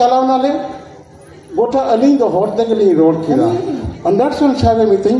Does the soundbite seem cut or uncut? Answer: cut